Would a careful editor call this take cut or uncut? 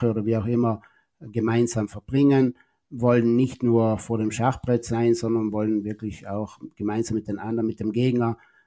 uncut